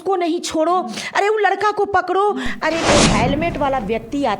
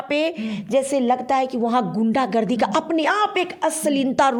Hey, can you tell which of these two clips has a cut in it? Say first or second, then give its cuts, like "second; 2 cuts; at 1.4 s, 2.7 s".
first; 1 cut; at 2.9 s